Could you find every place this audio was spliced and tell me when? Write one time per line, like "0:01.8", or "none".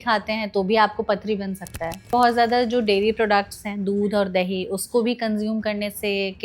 0:02.0